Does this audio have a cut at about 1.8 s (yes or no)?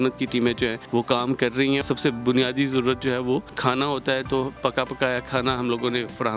yes